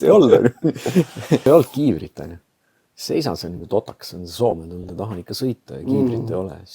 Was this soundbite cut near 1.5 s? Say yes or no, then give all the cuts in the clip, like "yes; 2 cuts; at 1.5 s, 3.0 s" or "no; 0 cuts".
yes; 1 cut; at 1.5 s